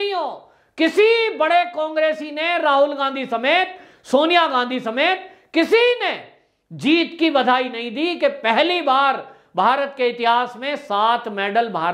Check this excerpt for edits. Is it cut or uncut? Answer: uncut